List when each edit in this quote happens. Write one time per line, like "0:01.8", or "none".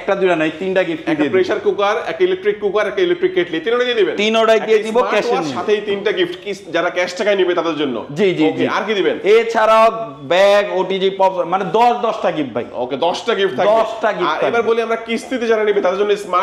none